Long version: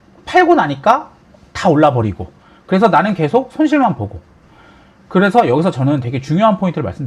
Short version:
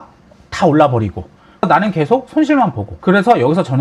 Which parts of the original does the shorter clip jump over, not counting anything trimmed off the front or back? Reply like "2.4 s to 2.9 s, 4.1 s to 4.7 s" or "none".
2.7 s to 2.9 s, 4.1 s to 4.9 s